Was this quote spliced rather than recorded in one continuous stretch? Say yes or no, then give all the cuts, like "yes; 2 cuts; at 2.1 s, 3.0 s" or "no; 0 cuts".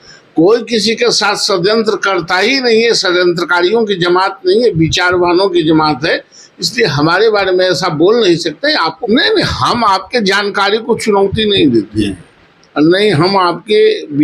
yes; 1 cut; at 9.0 s